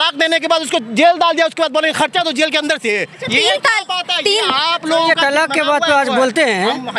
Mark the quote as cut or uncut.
cut